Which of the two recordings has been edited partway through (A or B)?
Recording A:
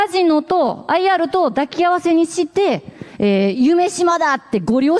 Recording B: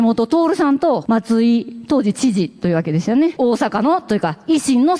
B